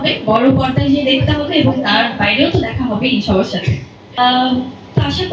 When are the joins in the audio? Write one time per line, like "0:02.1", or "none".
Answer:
0:04.2